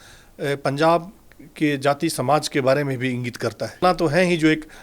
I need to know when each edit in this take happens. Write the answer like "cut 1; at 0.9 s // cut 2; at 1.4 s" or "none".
cut 1; at 3.8 s